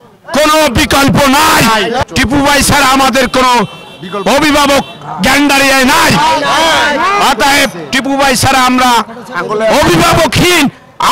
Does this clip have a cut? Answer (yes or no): yes